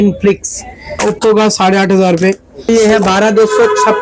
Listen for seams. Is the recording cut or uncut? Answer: cut